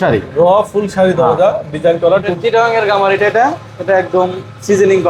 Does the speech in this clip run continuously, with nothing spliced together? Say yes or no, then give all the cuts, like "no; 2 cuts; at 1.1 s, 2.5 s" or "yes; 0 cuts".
no; 1 cut; at 2.3 s